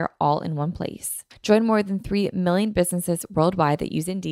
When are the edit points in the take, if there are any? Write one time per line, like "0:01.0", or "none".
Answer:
0:01.3